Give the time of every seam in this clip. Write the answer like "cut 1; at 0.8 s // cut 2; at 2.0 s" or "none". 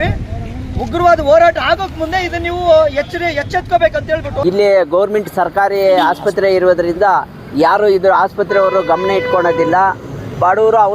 cut 1; at 4.3 s